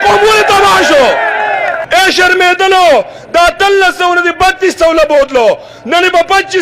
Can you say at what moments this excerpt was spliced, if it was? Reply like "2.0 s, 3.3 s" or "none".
1.8 s